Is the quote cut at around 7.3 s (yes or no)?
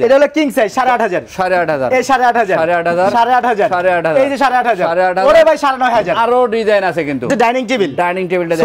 yes